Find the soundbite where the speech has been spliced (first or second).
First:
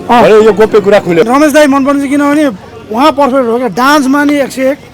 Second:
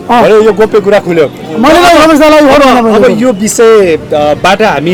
first